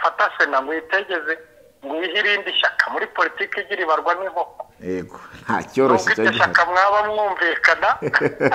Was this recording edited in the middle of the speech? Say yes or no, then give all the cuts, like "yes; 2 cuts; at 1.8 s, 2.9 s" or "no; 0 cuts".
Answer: no; 0 cuts